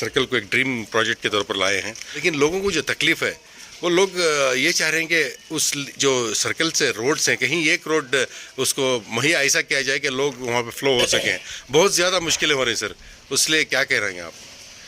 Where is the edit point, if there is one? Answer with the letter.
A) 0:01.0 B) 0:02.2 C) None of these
B